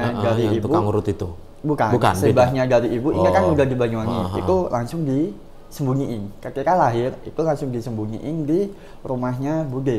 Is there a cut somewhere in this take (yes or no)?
no